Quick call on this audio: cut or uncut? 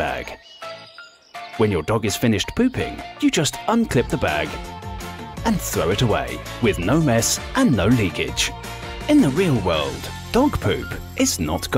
uncut